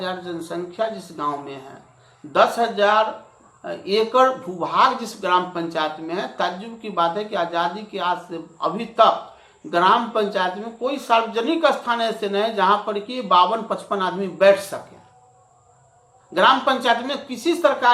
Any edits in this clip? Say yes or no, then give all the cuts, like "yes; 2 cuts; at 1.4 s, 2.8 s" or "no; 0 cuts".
no; 0 cuts